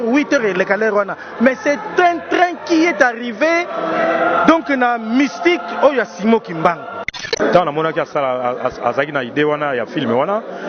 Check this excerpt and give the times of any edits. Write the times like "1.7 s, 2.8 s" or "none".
7.1 s